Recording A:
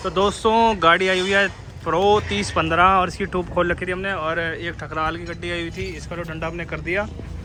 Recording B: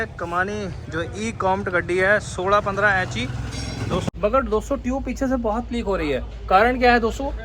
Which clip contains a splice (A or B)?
B